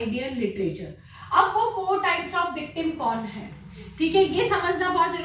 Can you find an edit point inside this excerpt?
no; 0 cuts

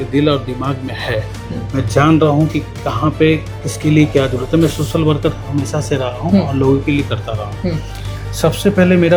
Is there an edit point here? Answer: no; 0 cuts

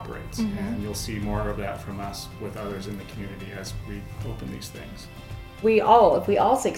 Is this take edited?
yes; 1 cut; at 5.6 s

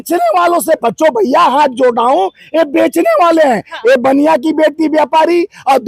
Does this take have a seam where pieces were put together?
no; 0 cuts

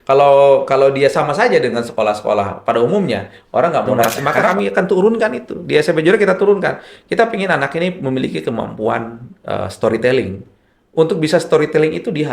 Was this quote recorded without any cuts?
no; 1 cut; at 4.3 s

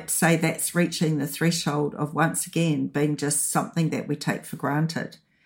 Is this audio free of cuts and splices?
yes; 0 cuts

